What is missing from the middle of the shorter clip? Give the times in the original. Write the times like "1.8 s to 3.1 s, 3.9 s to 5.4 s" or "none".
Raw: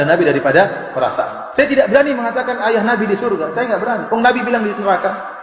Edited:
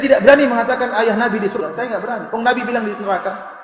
3.2 s to 3.3 s